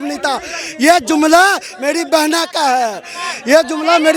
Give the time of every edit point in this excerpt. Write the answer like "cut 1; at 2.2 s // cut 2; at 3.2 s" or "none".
none